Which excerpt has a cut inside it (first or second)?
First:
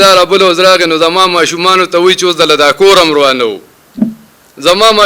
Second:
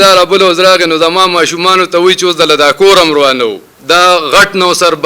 second